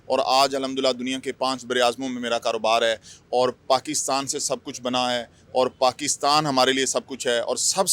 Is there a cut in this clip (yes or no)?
no